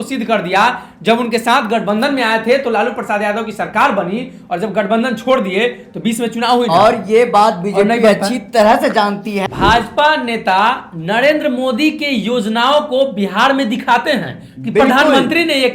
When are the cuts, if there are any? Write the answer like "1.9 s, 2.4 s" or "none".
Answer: 9.4 s

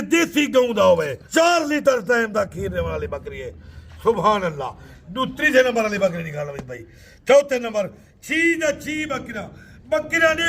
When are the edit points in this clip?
1.2 s

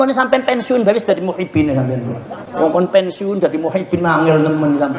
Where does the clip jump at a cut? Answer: 2.4 s

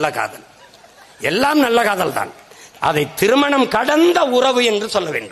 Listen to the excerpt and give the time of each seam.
none

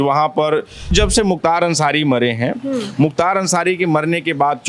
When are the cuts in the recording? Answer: 0.9 s

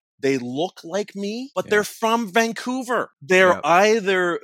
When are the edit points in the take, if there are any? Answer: 1.5 s, 3.1 s

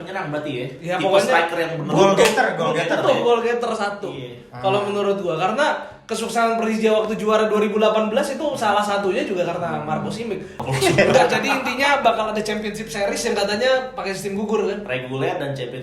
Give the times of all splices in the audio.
10.6 s

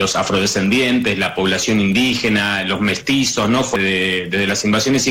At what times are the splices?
3.8 s

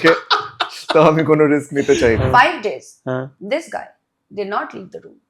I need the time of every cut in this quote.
2.2 s

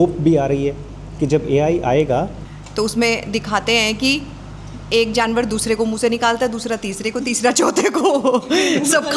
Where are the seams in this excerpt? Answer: 2.4 s

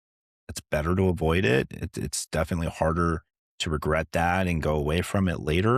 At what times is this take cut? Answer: none

